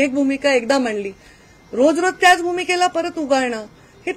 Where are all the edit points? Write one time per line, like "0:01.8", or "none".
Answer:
none